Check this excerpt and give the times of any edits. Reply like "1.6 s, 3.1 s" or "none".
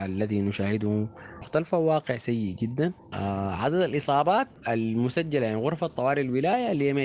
1.5 s, 3.1 s

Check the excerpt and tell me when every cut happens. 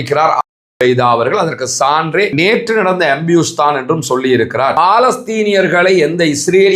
2.1 s, 4.7 s

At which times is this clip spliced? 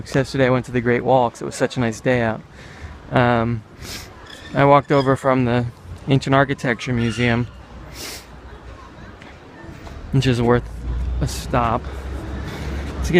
none

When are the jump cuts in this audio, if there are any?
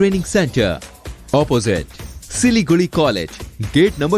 none

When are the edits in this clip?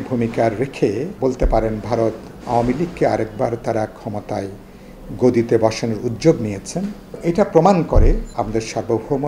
1.1 s, 7.1 s, 8.3 s

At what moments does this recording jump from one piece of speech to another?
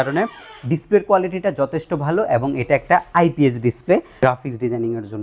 4.1 s

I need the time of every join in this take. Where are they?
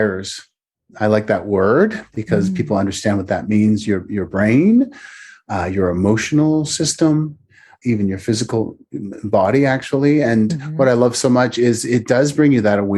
7.7 s

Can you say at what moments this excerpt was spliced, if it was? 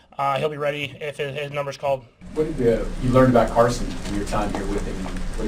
2.2 s

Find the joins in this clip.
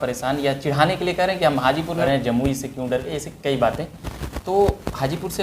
2.0 s

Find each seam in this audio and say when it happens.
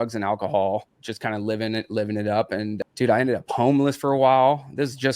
1.0 s, 2.8 s

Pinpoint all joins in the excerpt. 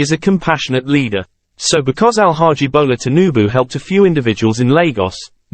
1.4 s

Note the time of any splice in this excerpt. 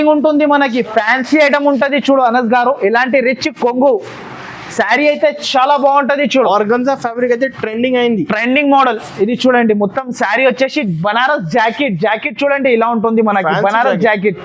none

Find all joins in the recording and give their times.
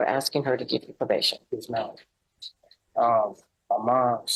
none

